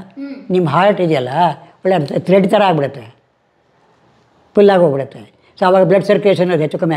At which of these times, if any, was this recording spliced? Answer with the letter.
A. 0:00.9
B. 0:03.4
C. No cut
C